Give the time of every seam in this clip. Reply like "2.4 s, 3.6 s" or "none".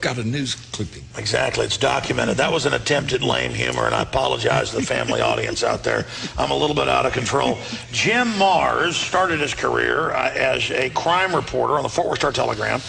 none